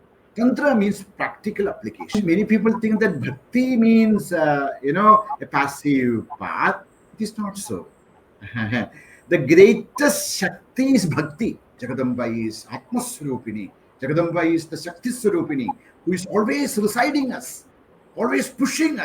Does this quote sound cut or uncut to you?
cut